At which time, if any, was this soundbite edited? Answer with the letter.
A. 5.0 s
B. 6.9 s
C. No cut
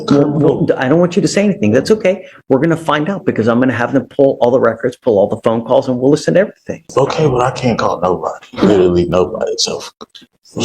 B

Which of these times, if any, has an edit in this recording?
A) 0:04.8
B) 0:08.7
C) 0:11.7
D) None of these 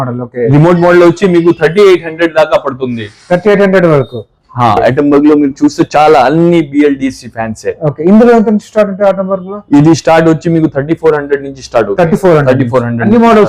A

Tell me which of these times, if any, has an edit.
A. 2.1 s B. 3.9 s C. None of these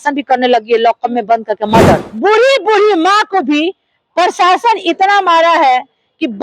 A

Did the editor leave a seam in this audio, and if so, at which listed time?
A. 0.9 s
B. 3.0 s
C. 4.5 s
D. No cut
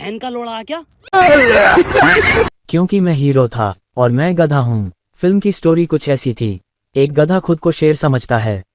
A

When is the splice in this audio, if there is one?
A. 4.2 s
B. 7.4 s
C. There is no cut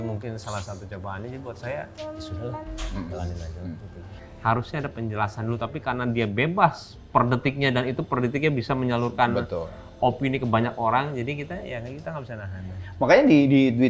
A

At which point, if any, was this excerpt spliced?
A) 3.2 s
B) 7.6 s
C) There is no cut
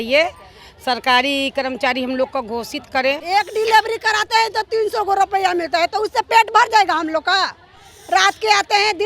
A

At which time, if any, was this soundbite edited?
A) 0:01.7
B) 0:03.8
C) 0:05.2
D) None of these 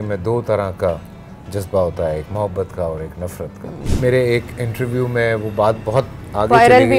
B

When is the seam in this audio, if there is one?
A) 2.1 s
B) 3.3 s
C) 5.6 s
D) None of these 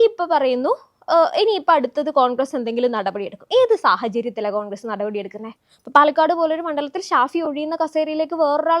C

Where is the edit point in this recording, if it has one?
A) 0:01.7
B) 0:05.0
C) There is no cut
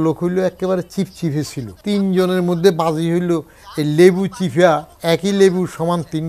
A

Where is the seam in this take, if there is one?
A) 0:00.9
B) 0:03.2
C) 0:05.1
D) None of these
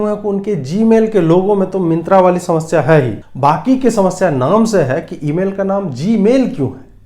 B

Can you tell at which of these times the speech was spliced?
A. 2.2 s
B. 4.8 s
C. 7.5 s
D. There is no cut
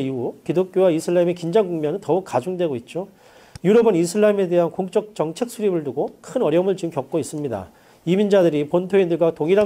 B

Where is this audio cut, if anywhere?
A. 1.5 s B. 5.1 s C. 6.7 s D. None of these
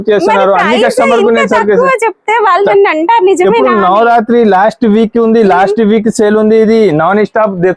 D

